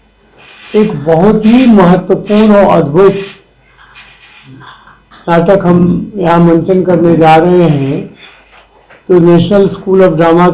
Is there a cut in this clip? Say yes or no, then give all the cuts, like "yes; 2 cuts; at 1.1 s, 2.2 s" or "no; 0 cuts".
no; 0 cuts